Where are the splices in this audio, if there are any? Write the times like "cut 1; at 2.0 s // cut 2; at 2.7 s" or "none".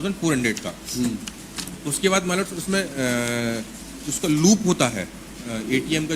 none